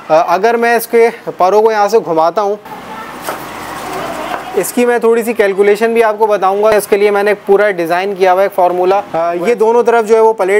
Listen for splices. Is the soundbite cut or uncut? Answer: cut